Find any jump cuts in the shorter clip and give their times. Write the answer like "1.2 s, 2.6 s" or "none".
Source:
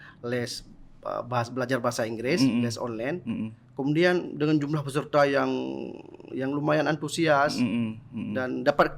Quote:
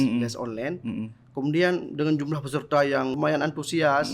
3.2 s